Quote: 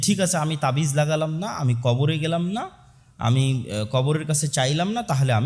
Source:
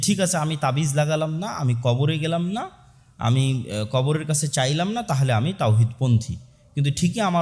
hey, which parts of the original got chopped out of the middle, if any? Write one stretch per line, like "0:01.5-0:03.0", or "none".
none